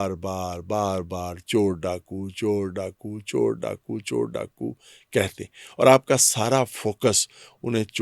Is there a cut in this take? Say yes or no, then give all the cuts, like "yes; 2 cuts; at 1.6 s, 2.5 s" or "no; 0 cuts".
no; 0 cuts